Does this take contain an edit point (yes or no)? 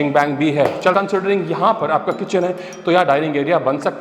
yes